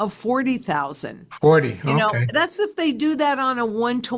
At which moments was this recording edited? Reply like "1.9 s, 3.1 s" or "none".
none